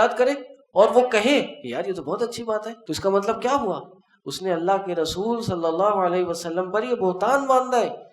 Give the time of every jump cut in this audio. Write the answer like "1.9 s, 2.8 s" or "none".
2.7 s